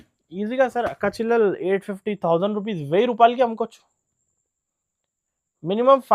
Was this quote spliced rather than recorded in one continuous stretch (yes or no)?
no